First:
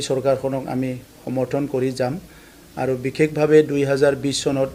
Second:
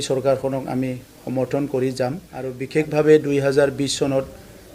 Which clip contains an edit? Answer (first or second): second